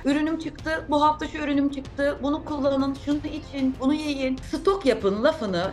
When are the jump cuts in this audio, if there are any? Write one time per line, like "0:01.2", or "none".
0:04.4